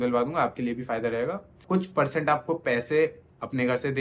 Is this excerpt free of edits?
no; 1 cut; at 1.6 s

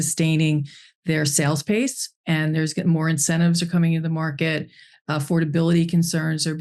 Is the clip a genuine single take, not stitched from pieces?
yes; 0 cuts

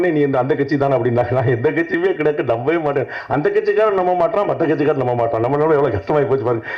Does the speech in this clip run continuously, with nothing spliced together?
yes; 0 cuts

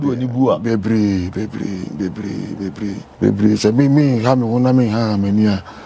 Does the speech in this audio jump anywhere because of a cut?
yes; 1 cut; at 3.1 s

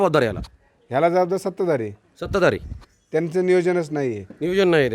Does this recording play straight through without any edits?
yes; 0 cuts

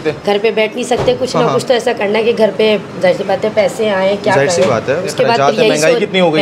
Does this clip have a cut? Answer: yes; 1 cut; at 5.1 s

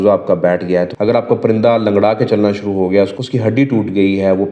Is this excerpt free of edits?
no; 2 cuts; at 0.9 s, 3.2 s

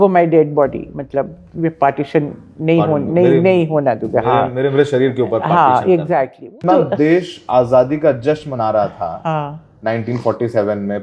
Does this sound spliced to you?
yes; 1 cut; at 6.6 s

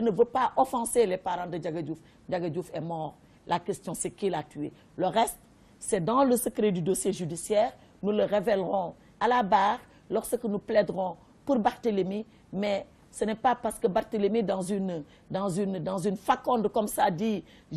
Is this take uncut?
no; 1 cut; at 16.4 s

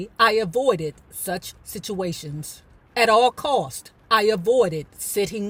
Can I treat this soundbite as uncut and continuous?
yes; 0 cuts

